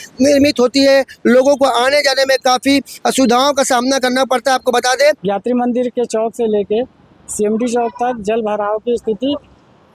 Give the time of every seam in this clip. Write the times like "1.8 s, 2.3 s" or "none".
5.2 s